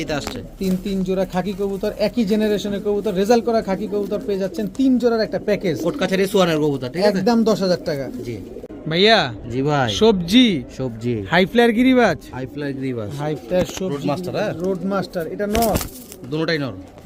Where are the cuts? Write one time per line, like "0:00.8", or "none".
none